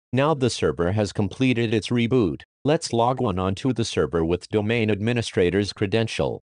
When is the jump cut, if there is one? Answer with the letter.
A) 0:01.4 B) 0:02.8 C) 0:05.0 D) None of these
B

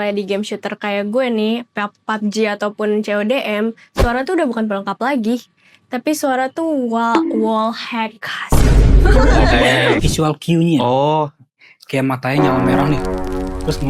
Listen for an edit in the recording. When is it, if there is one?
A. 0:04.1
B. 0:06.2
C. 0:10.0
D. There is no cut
C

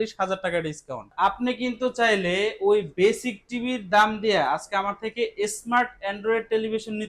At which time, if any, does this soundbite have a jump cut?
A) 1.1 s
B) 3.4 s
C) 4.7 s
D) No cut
A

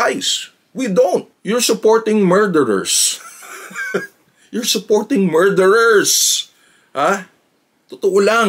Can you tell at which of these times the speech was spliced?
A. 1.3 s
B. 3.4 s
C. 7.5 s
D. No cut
A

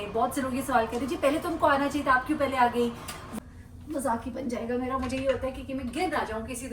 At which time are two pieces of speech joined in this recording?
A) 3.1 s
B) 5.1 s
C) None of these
A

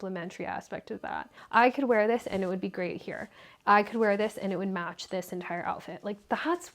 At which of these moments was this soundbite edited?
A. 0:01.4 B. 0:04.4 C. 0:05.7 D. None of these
A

